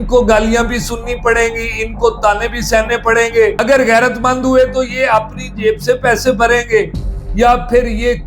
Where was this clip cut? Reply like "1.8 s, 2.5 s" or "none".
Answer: 3.6 s